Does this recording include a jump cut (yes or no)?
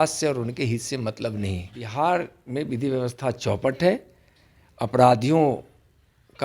yes